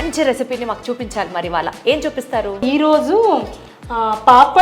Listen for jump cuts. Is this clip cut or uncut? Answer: cut